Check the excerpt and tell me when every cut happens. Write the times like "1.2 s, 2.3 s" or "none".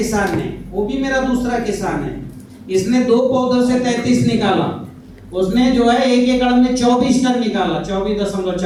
none